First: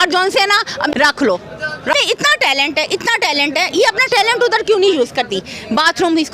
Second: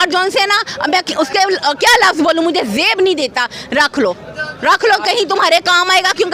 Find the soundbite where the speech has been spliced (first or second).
first